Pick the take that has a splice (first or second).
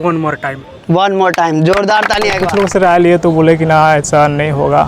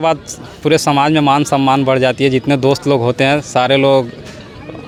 first